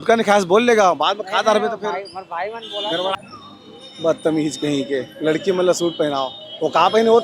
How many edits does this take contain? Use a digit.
1